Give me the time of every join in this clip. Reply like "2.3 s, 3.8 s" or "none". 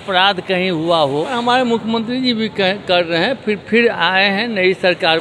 1.3 s